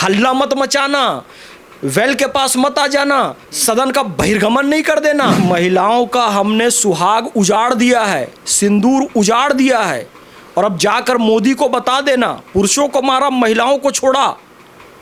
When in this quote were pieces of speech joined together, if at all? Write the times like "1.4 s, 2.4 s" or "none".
5.4 s